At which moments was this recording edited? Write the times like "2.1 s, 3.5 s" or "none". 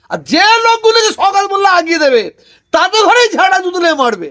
none